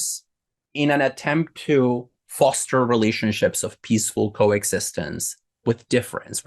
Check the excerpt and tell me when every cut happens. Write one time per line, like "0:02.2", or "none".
none